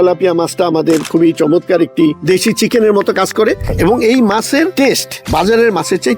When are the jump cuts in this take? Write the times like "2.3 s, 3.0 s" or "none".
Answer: 2.2 s, 3.7 s, 4.9 s